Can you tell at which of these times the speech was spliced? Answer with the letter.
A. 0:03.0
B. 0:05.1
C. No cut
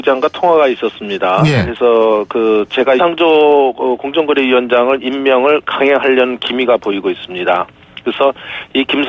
C